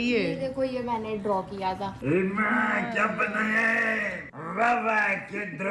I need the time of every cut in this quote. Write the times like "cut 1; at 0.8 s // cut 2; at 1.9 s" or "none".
cut 1; at 1.9 s // cut 2; at 4.3 s